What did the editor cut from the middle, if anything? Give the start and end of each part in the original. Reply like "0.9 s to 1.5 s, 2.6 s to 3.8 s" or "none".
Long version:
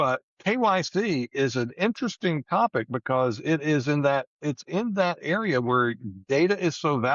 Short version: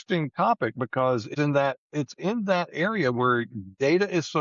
3.5 s to 3.8 s